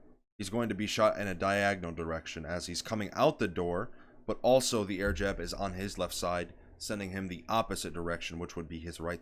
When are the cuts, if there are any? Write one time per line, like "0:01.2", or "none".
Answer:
none